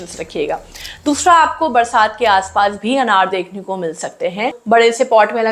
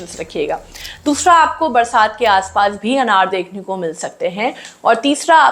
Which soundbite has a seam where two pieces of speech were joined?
first; 1 cut; at 4.6 s

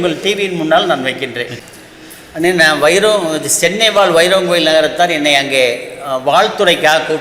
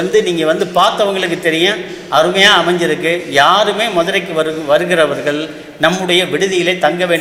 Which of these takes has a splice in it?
first; 1 cut; at 1.5 s

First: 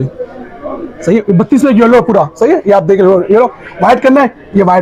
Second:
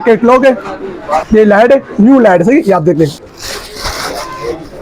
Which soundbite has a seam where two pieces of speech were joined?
second; 2 cuts; at 1.2 s, 3.3 s

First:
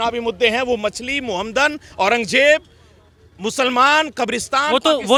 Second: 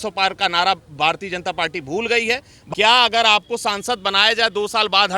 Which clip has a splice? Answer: second; 1 cut; at 2.6 s

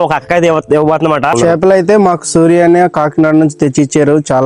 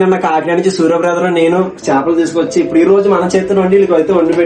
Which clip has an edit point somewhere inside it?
first; 1 cut; at 1.3 s

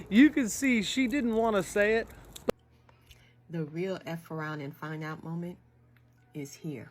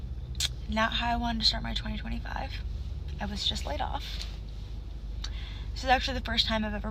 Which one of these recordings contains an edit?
first; 1 cut; at 2.4 s

